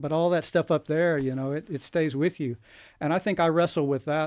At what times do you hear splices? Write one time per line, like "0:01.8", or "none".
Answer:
none